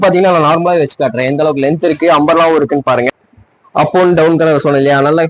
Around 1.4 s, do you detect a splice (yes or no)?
no